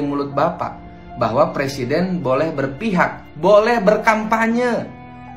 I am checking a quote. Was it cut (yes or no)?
no